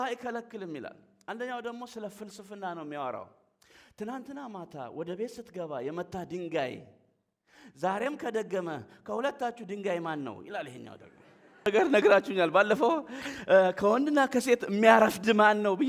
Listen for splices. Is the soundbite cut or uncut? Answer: cut